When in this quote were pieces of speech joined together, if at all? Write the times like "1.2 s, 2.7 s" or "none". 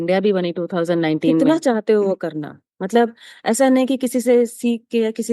1.4 s

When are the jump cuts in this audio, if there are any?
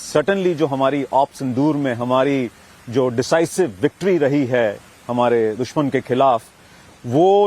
4.0 s

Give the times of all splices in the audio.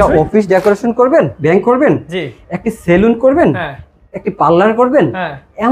1.3 s

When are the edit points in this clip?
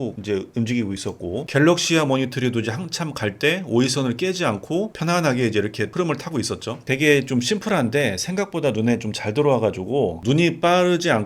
4.9 s, 6.9 s

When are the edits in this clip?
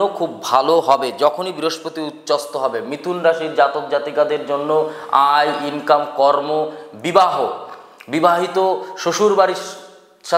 none

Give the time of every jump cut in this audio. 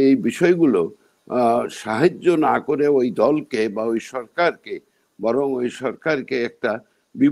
none

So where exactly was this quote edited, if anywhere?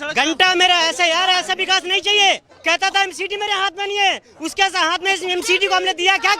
2.5 s

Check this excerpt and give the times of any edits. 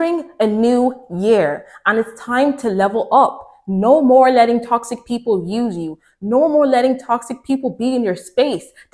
none

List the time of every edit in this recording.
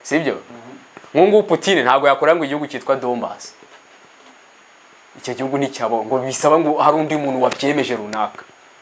none

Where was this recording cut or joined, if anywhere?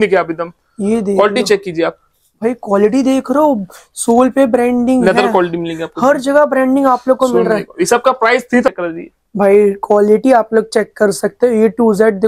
8.7 s

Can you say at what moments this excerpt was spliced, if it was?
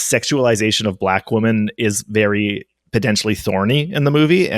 2.7 s

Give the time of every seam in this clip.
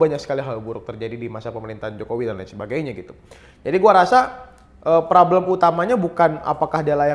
none

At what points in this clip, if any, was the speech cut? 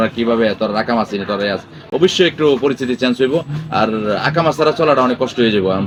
none

